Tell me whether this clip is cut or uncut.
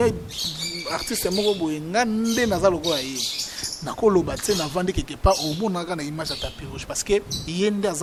uncut